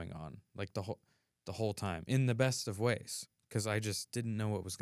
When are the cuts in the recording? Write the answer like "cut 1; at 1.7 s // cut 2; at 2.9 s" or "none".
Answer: none